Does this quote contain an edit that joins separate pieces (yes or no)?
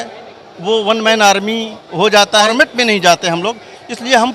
yes